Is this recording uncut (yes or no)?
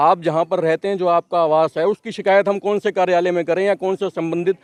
yes